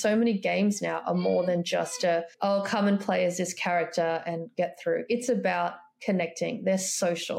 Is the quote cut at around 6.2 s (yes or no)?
no